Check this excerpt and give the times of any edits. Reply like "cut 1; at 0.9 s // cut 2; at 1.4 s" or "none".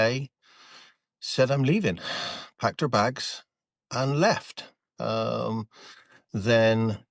none